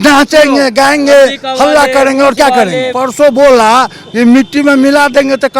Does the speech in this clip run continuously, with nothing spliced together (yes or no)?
no